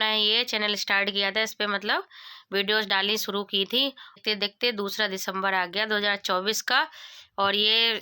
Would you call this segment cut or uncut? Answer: uncut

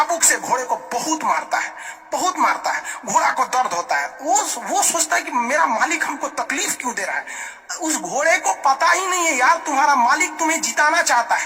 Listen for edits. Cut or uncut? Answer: uncut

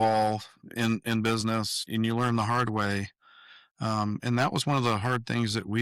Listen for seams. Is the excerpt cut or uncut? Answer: uncut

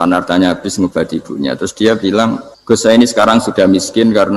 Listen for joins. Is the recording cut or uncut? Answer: cut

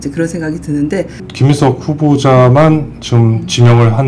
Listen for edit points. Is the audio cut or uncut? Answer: cut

